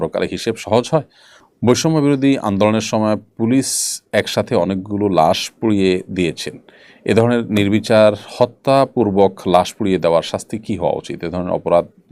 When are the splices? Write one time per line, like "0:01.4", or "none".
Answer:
0:01.0

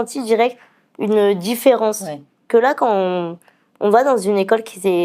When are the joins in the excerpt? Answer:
0:02.5

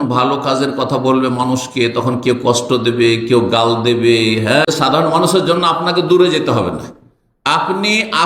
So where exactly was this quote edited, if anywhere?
0:04.7

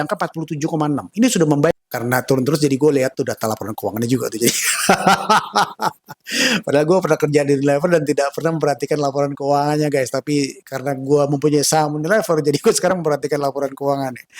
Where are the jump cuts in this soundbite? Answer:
0:01.8

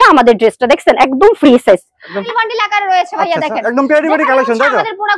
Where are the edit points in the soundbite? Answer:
0:02.2

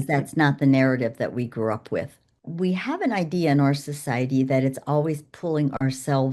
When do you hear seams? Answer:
0:02.4

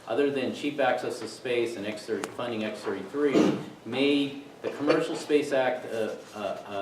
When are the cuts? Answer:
0:04.4

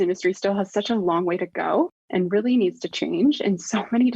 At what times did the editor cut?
0:02.0

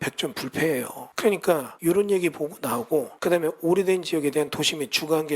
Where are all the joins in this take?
0:01.0
0:01.7
0:03.1

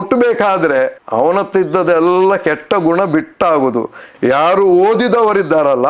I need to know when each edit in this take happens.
0:04.0

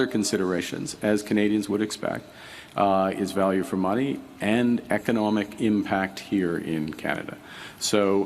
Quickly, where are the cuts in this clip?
none

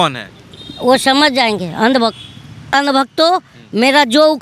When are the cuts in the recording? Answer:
0:02.7

